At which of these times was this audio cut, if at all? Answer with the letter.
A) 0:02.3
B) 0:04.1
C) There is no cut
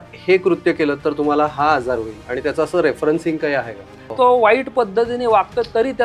B